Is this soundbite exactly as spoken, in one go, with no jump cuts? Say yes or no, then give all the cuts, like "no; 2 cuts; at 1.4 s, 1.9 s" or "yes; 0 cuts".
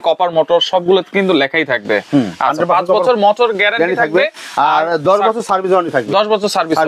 yes; 0 cuts